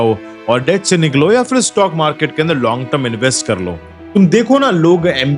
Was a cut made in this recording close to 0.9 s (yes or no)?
no